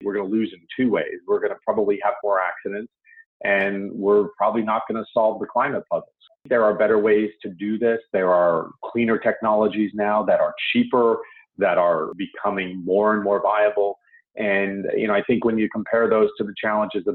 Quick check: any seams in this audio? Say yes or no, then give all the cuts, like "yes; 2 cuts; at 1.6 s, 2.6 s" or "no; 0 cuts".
yes; 1 cut; at 6.4 s